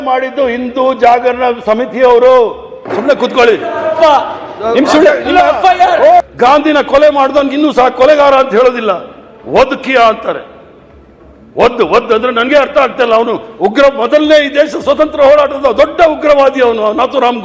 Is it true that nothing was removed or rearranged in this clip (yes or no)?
no